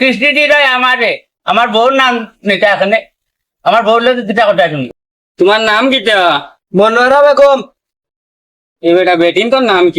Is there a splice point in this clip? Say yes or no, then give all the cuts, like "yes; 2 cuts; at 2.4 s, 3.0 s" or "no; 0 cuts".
yes; 1 cut; at 4.8 s